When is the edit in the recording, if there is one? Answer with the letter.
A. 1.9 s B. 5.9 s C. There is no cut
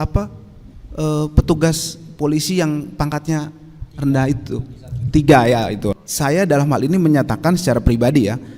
B